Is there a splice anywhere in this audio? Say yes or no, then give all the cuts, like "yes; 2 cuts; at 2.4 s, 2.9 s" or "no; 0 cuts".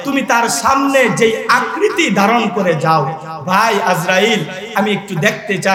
no; 0 cuts